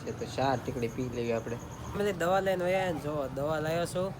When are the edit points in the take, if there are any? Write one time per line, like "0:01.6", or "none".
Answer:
0:01.8